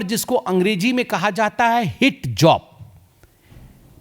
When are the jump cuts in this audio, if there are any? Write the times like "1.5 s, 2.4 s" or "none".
none